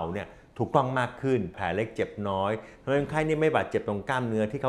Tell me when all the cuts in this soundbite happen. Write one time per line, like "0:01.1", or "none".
0:01.6